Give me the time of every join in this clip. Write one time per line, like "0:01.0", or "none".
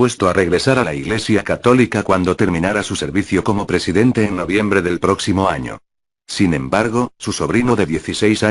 0:05.9